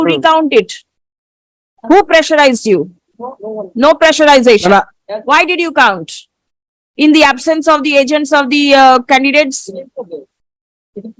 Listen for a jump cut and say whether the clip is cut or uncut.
uncut